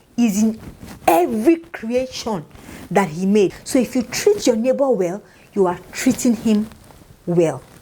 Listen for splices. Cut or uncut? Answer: cut